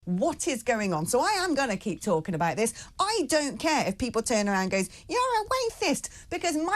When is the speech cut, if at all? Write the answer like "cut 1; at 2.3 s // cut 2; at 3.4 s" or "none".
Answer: none